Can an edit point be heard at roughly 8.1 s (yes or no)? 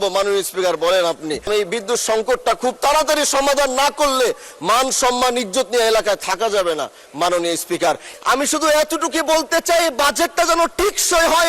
yes